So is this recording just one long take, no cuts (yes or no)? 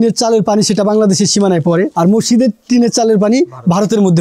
no